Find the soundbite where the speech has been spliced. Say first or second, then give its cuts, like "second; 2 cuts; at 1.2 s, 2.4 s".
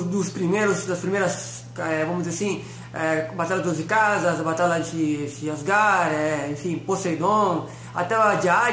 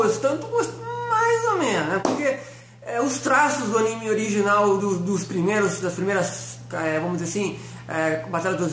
second; 1 cut; at 3.7 s